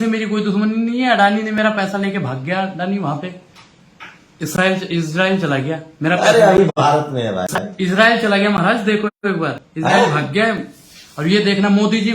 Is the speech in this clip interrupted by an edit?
no; 0 cuts

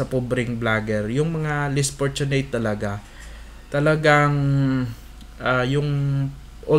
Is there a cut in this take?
no; 0 cuts

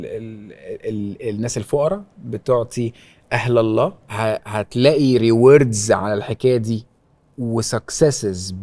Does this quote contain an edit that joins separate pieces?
yes; 1 cut; at 4.1 s

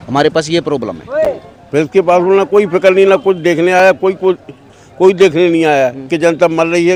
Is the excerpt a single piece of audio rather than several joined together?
yes; 0 cuts

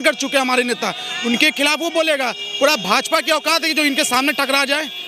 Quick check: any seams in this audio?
no; 0 cuts

